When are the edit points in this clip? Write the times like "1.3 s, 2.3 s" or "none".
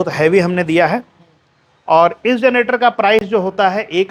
none